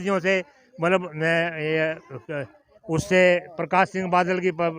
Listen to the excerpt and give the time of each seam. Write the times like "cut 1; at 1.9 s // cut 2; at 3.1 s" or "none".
none